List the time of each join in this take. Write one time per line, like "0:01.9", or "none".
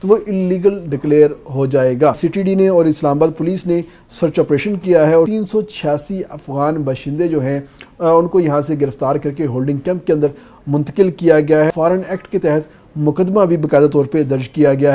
0:02.2
0:05.3
0:11.7